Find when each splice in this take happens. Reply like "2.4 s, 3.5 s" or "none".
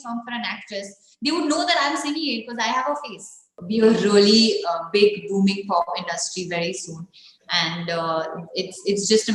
3.5 s